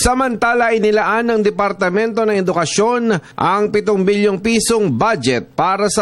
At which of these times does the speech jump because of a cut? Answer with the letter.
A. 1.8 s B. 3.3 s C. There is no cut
B